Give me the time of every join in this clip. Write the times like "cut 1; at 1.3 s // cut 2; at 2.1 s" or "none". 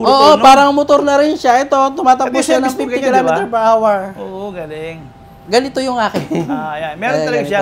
none